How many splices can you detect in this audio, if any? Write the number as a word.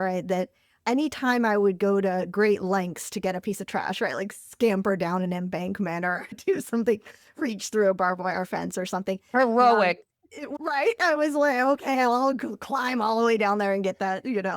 two